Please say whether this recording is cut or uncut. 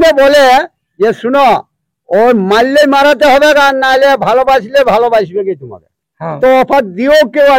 cut